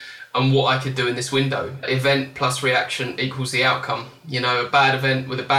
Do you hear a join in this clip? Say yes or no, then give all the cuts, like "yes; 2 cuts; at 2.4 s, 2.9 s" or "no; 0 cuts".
yes; 1 cut; at 1.8 s